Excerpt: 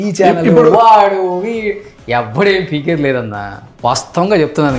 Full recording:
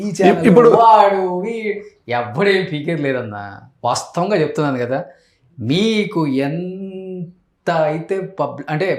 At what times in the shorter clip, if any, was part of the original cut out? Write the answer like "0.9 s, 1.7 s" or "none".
none